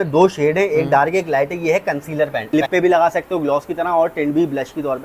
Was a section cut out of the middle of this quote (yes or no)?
yes